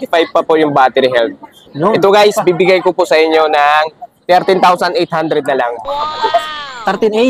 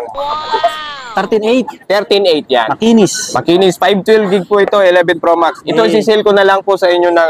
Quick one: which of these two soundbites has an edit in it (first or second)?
second